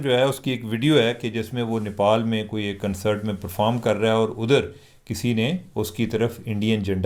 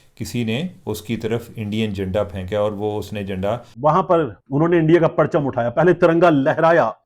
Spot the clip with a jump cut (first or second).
second